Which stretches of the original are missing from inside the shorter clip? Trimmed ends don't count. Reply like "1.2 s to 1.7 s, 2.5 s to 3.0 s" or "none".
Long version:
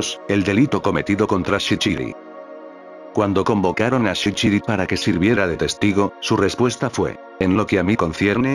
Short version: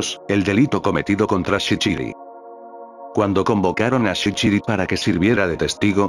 none